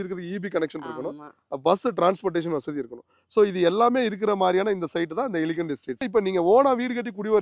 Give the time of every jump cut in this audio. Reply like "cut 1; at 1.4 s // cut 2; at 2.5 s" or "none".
cut 1; at 6.1 s